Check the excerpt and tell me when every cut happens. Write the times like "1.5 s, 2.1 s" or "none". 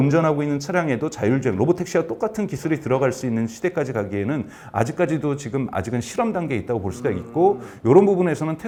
none